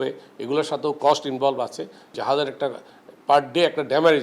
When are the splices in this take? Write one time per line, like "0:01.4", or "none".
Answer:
0:02.1

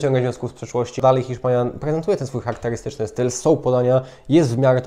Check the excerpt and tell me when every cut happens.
0:01.0

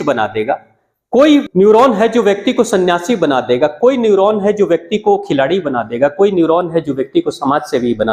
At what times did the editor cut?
0:01.5

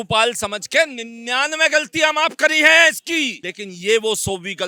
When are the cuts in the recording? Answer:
none

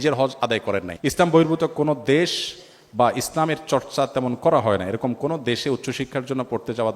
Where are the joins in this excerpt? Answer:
0:00.9

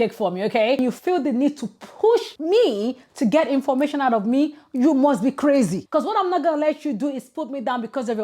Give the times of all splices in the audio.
0:00.8
0:05.8

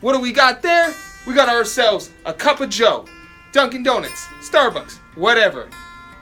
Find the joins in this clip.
none

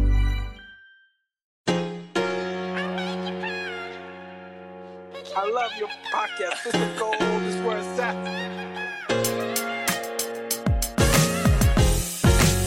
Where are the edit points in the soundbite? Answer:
0:01.6

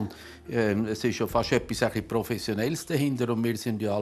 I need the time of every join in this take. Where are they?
none

